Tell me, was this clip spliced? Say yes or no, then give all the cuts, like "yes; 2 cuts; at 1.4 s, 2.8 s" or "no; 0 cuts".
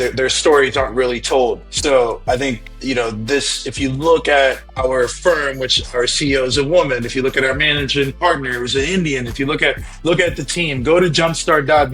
yes; 3 cuts; at 1.7 s, 2.7 s, 4.7 s